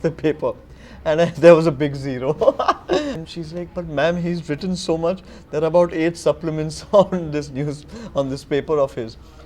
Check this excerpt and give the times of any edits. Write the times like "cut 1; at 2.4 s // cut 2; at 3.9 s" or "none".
cut 1; at 3.2 s